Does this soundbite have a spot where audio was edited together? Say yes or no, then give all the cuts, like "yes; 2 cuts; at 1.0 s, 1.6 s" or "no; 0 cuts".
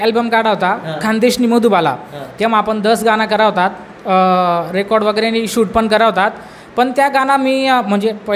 no; 0 cuts